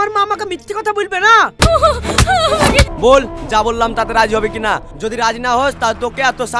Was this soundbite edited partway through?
yes; 2 cuts; at 1.5 s, 2.9 s

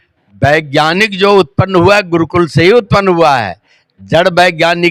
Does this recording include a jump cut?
no; 0 cuts

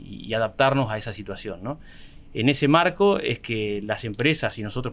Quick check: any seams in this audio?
no; 0 cuts

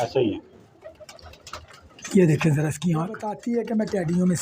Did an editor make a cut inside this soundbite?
yes; 1 cut; at 3.3 s

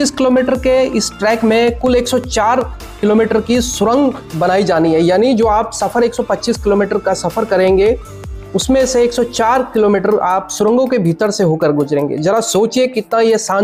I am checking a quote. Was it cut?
no; 0 cuts

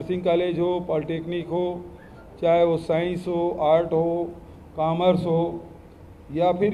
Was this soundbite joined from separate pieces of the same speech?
no; 0 cuts

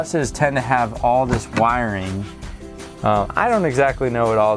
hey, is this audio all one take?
yes; 0 cuts

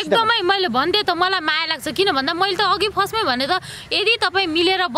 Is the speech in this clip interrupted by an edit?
no; 0 cuts

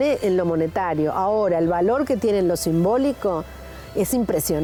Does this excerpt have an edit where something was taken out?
no; 0 cuts

